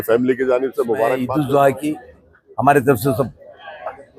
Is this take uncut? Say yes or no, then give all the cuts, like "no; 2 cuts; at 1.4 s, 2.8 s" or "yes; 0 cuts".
no; 1 cut; at 1.2 s